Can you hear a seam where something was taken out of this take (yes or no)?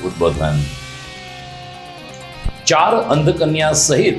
yes